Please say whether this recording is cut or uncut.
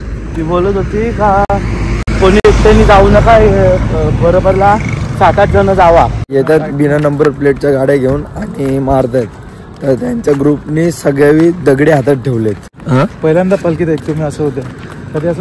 cut